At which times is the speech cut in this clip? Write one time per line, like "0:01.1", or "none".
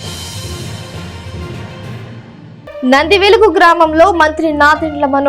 0:02.1